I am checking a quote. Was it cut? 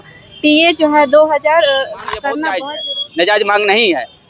yes; 1 cut; at 2.7 s

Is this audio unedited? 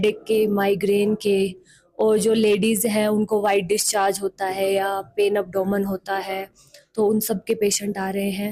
yes; 0 cuts

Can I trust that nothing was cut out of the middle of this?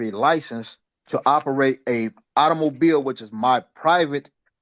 yes; 0 cuts

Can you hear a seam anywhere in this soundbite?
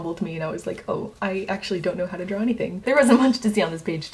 yes; 1 cut; at 2.8 s

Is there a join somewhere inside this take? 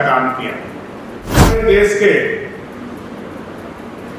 yes; 1 cut; at 1.6 s

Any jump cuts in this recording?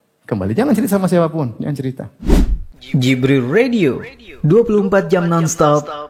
yes; 1 cut; at 2.1 s

